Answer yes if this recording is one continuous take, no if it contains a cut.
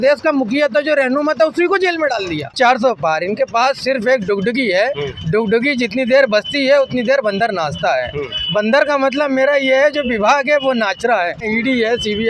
no